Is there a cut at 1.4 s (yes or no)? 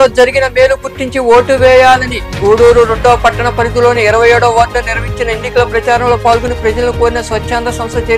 no